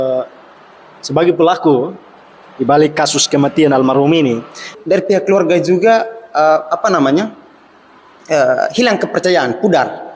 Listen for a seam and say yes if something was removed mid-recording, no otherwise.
yes